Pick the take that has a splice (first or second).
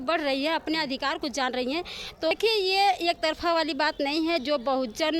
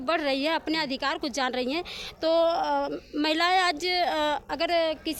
first